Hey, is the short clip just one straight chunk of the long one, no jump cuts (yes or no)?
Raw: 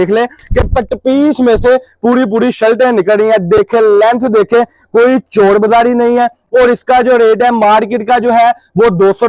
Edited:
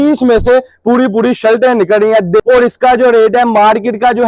no